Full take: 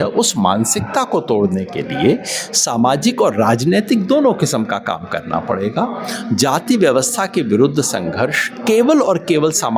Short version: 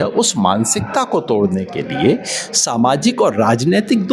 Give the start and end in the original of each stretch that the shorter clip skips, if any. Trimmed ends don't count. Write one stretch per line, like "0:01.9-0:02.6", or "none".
none